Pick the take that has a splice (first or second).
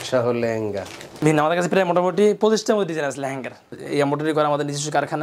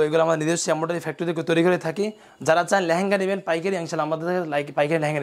first